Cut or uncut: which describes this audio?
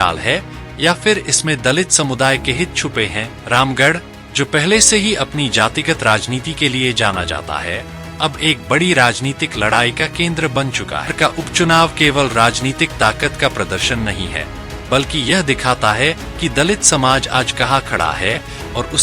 cut